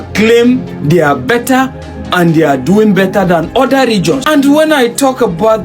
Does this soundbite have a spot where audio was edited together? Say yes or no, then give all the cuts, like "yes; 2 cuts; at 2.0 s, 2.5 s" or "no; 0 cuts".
yes; 1 cut; at 4.2 s